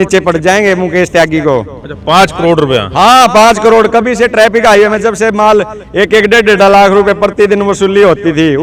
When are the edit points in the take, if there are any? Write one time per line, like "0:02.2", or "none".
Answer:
none